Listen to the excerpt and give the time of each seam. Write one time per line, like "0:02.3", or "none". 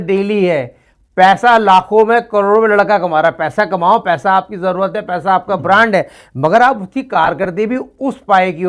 none